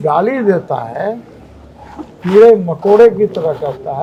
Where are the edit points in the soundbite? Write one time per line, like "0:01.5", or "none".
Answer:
none